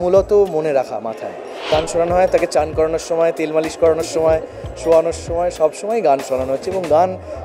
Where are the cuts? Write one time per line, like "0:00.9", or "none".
0:01.7